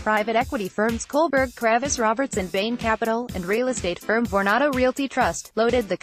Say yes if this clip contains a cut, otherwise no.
no